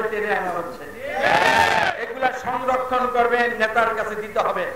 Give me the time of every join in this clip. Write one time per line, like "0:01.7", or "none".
none